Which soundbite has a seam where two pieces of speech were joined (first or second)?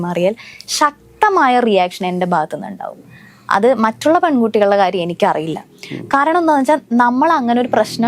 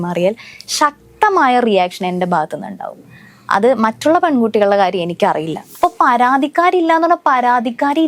second